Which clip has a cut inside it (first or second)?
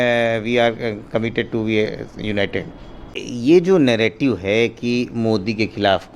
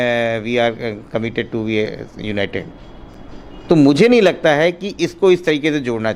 first